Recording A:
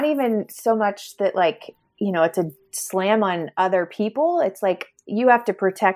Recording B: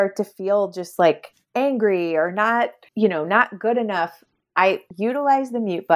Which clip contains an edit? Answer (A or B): B